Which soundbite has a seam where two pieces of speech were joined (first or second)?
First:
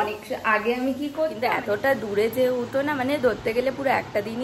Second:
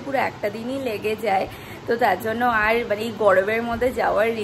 first